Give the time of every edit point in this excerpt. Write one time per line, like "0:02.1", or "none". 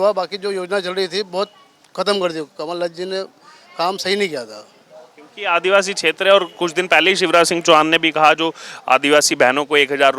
none

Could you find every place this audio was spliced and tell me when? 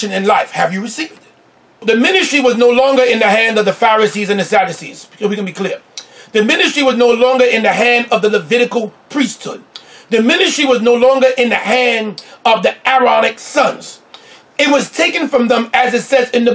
0:01.8

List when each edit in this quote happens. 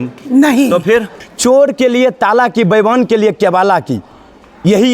0:01.2

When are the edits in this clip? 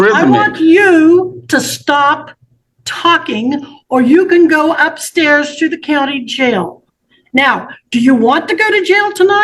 none

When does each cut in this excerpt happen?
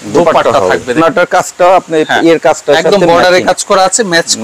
0:01.0

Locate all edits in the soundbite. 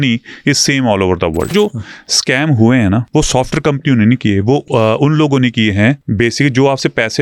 0:01.5
0:03.1
0:04.6
0:06.0

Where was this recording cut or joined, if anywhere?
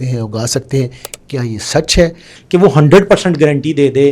0:02.3

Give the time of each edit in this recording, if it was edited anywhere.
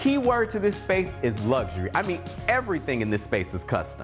none

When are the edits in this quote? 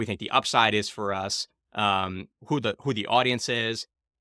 none

